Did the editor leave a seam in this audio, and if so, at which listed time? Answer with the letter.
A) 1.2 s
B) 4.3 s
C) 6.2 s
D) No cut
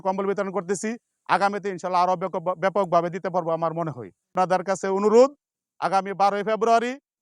B